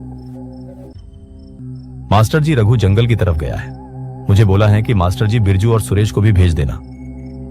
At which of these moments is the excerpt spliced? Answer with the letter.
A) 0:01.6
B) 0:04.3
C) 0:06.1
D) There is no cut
A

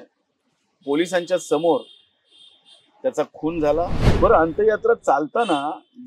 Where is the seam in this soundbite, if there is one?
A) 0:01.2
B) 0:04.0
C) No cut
B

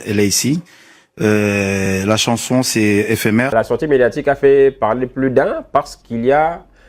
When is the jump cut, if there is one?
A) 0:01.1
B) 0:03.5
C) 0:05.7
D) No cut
B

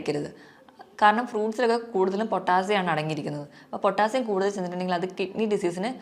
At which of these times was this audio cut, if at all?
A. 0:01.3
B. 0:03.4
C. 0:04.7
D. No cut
D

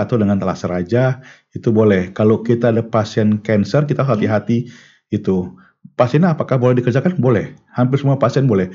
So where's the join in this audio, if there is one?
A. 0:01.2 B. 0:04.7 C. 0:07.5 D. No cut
D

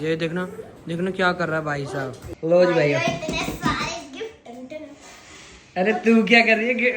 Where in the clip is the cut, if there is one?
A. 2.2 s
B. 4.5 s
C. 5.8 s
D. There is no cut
A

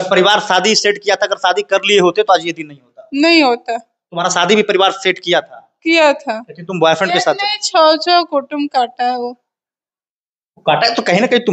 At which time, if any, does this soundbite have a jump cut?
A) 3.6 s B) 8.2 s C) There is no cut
C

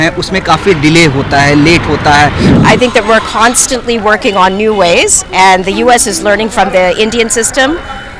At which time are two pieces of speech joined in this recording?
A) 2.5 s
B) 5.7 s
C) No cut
A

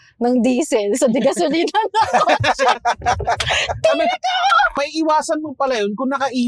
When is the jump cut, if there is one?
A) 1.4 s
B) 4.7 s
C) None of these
B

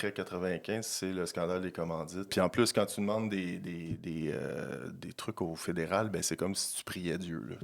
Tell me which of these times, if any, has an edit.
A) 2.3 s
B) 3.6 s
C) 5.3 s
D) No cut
A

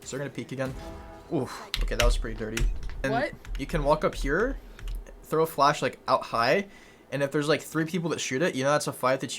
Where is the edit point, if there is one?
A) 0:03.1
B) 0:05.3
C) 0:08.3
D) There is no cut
A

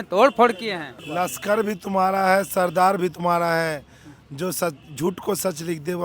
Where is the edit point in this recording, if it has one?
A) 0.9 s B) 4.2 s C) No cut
A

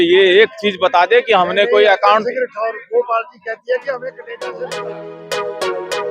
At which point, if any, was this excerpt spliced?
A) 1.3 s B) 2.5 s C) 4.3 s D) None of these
C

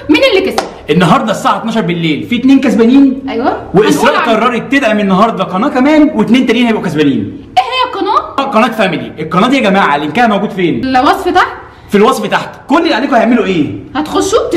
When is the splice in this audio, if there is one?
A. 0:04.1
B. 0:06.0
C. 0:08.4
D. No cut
C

